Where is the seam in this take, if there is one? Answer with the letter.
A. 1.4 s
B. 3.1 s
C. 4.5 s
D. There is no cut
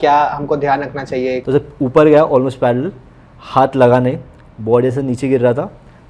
A